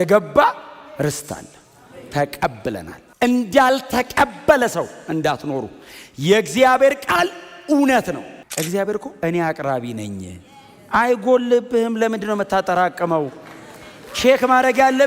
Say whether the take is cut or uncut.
cut